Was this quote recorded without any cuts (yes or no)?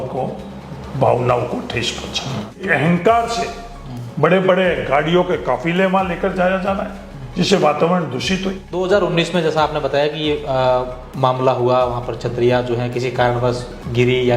no